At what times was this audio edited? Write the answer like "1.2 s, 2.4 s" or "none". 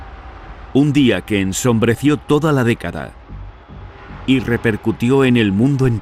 none